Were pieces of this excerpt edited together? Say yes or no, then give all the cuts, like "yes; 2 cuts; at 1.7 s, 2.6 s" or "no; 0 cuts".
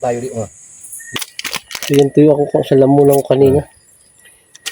yes; 1 cut; at 1.2 s